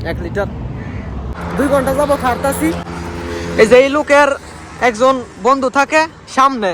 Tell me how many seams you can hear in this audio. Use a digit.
1